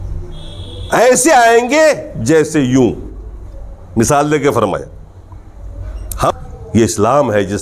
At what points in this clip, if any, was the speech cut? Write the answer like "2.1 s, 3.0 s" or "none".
6.3 s